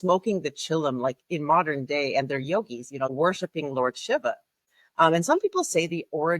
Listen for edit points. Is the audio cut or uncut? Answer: cut